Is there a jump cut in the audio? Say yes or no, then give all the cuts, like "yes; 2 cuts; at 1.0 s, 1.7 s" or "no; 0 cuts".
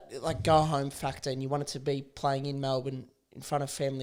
no; 0 cuts